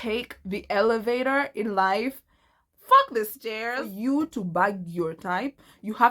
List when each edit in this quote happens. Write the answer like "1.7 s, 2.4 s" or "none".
4.1 s